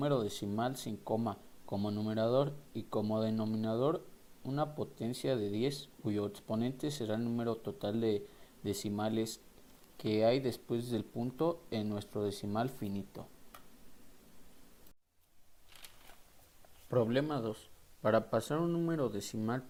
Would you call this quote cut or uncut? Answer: uncut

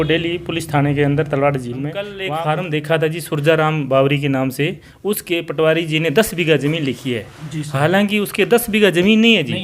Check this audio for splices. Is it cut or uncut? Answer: cut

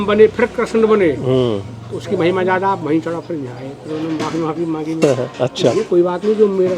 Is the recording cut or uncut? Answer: uncut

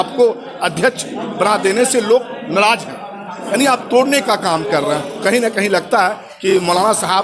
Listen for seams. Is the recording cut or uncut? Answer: cut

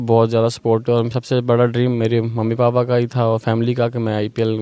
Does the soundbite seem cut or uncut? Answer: uncut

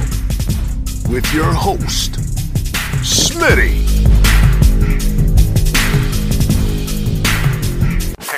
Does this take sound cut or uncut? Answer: uncut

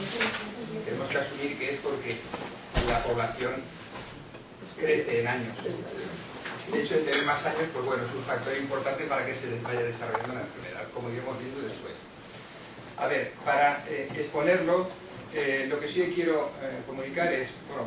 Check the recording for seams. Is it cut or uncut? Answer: cut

